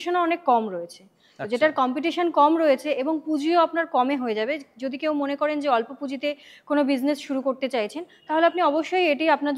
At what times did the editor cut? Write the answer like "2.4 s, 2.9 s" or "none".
none